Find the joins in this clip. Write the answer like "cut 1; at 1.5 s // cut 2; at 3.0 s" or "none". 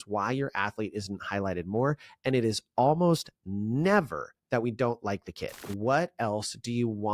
cut 1; at 5.7 s